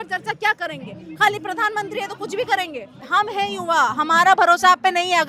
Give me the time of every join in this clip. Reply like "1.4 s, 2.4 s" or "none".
3.0 s